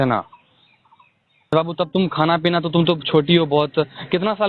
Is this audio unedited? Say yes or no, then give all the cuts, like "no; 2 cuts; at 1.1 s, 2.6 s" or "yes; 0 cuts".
no; 1 cut; at 1.5 s